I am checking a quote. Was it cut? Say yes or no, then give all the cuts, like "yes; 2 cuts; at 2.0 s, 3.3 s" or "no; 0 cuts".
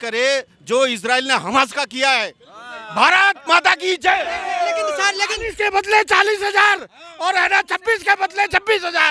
no; 0 cuts